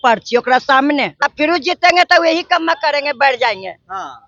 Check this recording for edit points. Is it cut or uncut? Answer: uncut